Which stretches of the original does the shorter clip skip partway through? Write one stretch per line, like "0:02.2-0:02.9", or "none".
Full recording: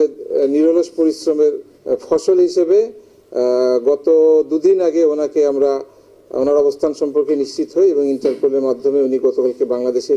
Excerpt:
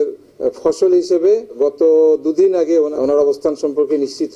0:03.0-0:03.8
0:05.2-0:06.3